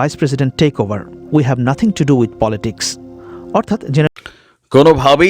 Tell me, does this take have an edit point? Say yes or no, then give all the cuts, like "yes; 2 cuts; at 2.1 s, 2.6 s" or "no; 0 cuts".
yes; 1 cut; at 4.1 s